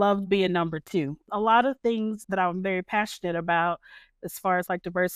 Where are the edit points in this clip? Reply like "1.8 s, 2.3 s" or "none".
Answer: 1.2 s, 2.2 s